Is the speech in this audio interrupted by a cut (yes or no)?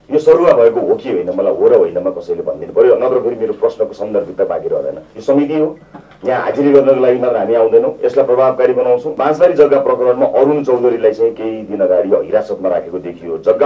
yes